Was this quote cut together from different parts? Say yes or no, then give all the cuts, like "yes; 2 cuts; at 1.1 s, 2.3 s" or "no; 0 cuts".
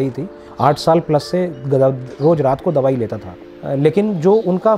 yes; 1 cut; at 3.6 s